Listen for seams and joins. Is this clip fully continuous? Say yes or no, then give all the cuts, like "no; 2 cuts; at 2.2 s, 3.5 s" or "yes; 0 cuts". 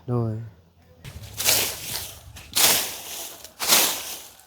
no; 1 cut; at 1.1 s